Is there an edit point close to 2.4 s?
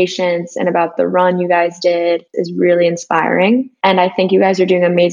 yes; 1 cut; at 2.4 s

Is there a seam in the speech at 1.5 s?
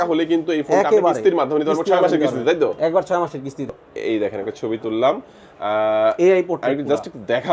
no; 1 cut; at 3.8 s

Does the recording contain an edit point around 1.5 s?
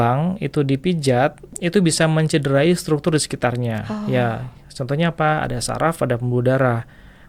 yes; 1 cut; at 1.5 s

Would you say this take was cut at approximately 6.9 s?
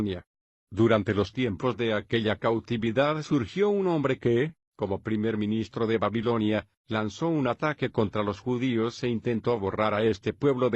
yes; 1 cut; at 6.9 s

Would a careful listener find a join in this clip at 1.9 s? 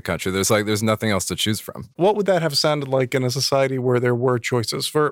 yes; 1 cut; at 1.9 s

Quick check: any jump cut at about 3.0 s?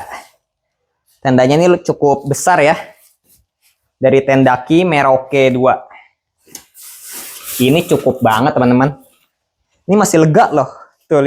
no; 0 cuts

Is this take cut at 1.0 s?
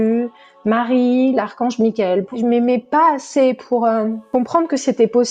no; 2 cuts; at 2.3 s, 4.2 s

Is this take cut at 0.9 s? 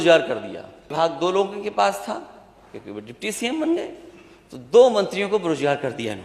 yes; 1 cut; at 0.9 s

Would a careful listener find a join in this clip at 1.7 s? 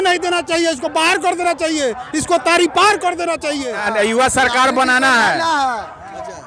no; 1 cut; at 3.8 s

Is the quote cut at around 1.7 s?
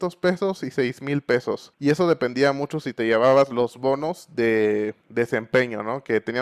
yes; 2 cuts; at 1.7 s, 5.0 s

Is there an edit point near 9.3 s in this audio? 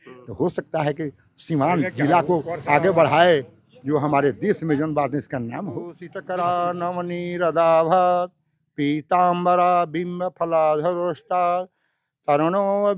no; 1 cut; at 6.1 s

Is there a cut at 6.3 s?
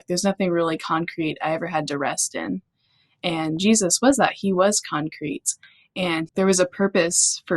yes; 1 cut; at 6.3 s

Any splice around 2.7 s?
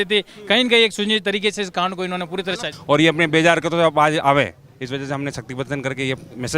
yes; 1 cut; at 2.7 s

